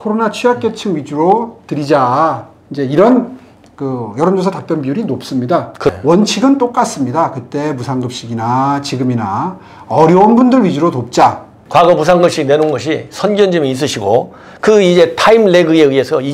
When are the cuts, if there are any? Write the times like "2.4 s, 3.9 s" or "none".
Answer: 5.9 s, 11.5 s

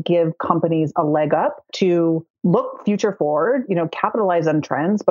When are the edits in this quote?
1.6 s, 2.4 s

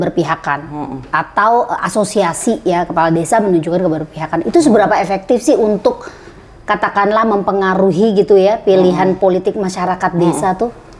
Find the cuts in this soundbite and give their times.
none

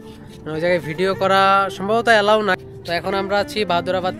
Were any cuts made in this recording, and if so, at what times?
2.6 s

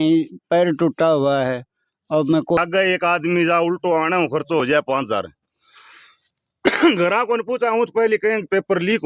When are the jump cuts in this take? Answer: 2.6 s

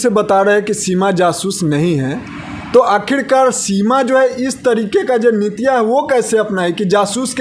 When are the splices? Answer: none

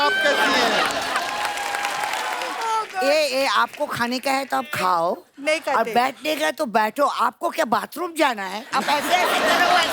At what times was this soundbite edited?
2.5 s

